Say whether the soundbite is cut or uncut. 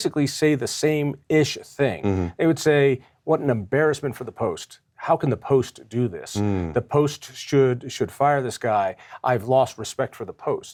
uncut